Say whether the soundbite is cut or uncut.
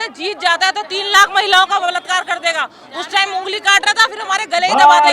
uncut